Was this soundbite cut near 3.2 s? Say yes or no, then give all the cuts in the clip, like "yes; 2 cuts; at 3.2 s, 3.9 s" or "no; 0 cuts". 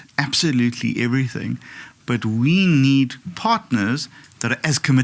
yes; 1 cut; at 3.2 s